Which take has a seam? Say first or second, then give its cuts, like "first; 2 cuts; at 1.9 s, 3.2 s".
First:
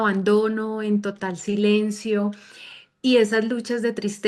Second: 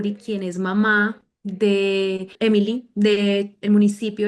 second; 1 cut; at 2.3 s